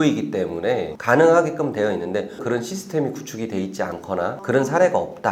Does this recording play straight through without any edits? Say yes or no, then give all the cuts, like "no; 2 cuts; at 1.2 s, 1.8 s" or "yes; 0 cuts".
no; 1 cut; at 2.3 s